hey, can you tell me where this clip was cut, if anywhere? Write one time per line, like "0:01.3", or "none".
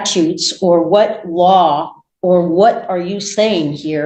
none

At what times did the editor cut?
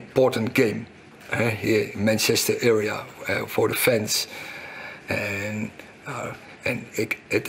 none

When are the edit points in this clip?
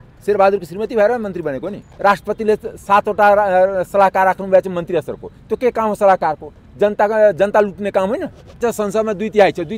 0:01.9
0:08.6

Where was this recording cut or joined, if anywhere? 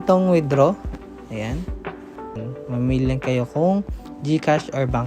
0:02.4

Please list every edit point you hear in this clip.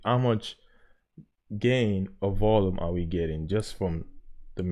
none

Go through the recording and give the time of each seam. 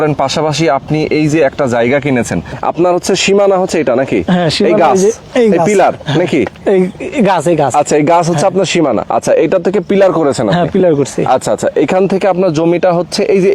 0:02.5
0:09.0

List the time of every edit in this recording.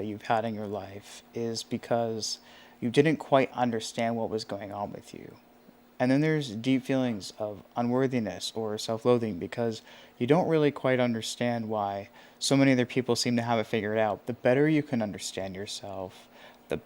0:05.8
0:14.2

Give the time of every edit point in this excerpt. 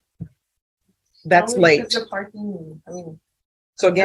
0:00.9

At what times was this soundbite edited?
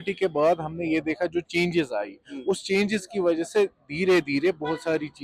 none

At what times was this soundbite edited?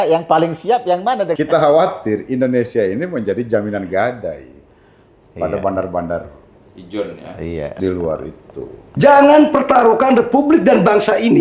0:01.3
0:08.9

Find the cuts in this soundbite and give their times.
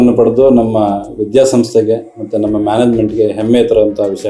none

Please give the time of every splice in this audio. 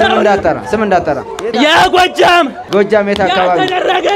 0:02.6

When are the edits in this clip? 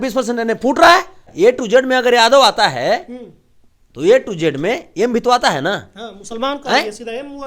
0:01.2

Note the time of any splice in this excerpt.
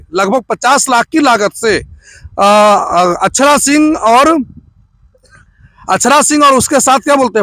none

